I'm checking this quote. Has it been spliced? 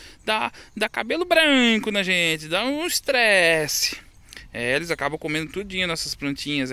no; 0 cuts

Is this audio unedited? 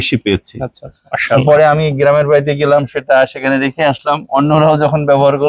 yes; 0 cuts

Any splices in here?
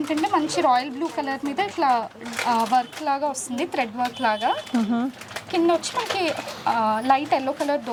no; 0 cuts

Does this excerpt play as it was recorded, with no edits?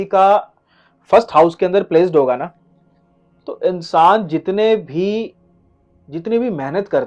yes; 0 cuts

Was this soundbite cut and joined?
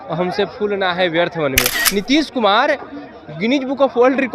yes; 1 cut; at 1.7 s

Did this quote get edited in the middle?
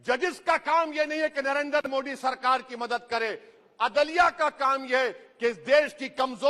no; 0 cuts

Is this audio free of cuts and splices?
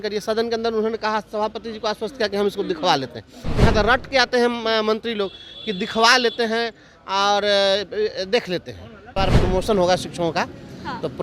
no; 1 cut; at 9.1 s

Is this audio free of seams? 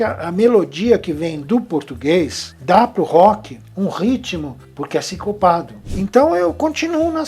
no; 1 cut; at 5.9 s

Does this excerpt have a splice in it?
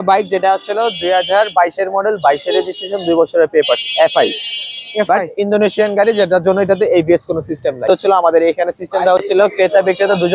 yes; 1 cut; at 7.8 s

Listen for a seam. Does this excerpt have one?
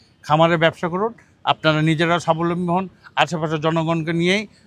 no; 0 cuts

